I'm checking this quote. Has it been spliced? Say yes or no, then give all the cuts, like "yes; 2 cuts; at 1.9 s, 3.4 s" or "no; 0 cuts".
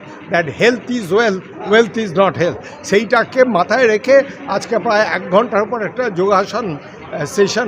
no; 0 cuts